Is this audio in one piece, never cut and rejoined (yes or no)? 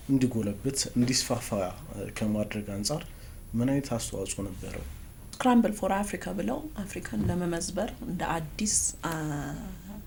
yes